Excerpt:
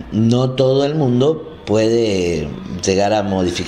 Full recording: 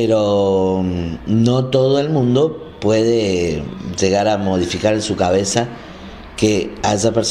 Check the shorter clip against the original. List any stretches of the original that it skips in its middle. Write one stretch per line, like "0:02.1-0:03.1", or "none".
none